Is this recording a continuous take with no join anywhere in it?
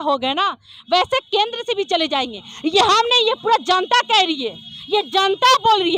yes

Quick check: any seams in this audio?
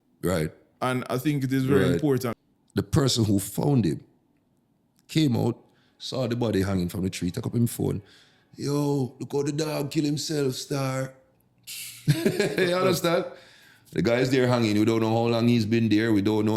yes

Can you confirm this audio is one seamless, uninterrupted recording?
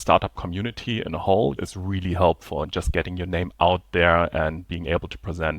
no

